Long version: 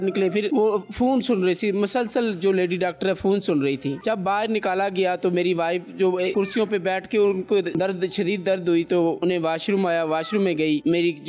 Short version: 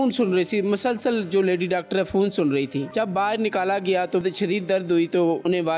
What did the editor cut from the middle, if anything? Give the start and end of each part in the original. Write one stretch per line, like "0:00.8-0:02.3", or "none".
0:05.3-0:08.0